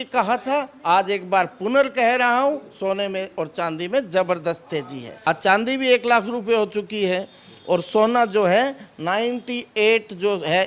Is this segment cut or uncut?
cut